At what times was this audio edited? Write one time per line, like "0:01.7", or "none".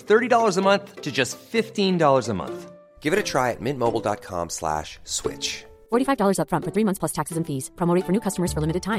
none